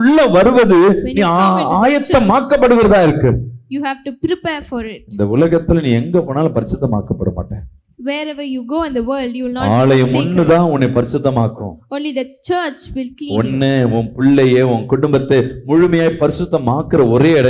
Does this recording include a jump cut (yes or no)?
no